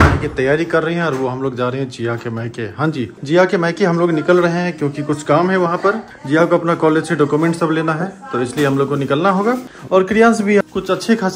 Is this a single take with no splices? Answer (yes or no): yes